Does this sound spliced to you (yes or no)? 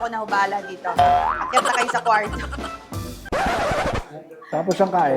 no